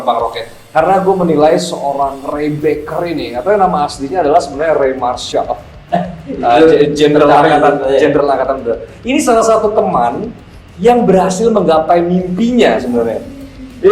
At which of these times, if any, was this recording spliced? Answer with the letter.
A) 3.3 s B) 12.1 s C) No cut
C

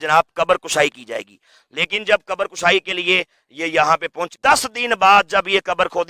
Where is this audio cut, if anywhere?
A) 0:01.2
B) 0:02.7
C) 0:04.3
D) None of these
C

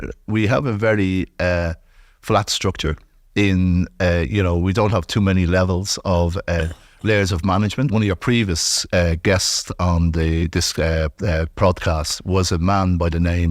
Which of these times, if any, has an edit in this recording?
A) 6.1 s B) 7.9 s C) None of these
B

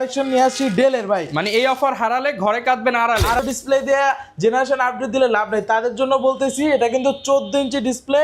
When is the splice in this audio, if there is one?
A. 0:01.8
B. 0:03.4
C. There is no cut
B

